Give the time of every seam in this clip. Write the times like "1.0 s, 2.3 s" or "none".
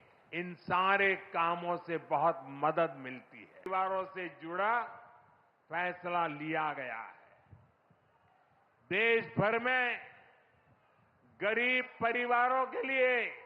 3.7 s